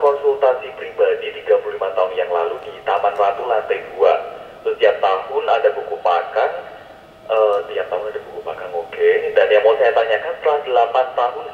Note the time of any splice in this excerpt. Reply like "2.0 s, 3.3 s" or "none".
none